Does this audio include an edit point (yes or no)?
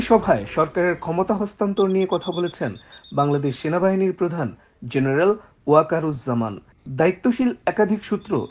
no